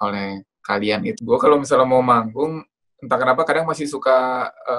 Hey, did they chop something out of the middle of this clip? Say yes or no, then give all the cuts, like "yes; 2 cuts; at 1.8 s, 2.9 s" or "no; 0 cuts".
yes; 1 cut; at 1.1 s